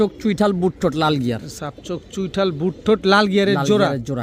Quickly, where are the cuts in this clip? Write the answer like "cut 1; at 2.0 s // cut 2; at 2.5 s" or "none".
none